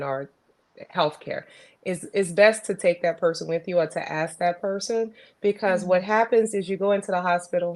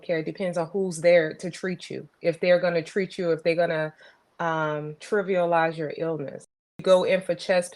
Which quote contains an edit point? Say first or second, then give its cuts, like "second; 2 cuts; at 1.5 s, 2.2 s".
second; 2 cuts; at 4.9 s, 6.8 s